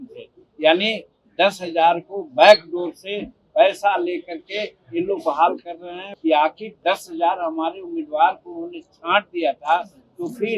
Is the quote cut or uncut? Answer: cut